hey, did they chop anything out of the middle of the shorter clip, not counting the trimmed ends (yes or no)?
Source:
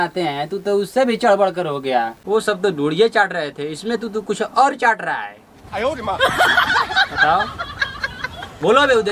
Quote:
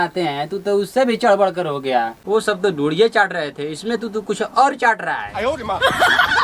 yes